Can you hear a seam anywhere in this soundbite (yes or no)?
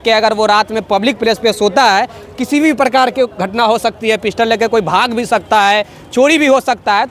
no